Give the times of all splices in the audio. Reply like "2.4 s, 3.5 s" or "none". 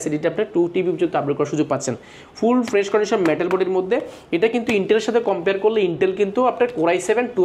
none